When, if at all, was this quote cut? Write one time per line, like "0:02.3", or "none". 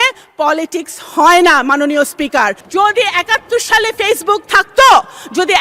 0:02.6